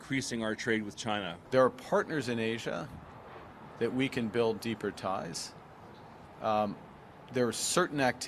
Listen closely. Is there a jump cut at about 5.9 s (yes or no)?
no